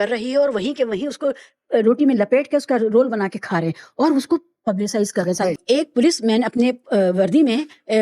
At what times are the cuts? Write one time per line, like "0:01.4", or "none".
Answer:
0:05.4